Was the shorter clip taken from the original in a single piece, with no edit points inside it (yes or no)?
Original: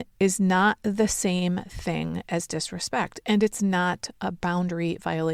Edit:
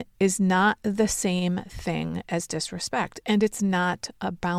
yes